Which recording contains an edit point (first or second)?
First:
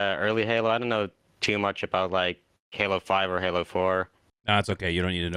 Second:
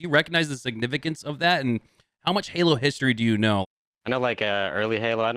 second